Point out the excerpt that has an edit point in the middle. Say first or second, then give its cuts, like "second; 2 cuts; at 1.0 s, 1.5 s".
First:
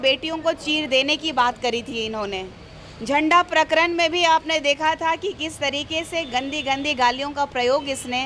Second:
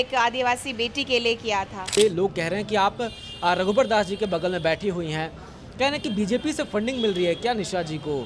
second; 1 cut; at 2.0 s